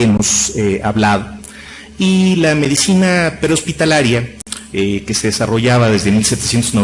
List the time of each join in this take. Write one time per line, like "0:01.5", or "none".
0:02.8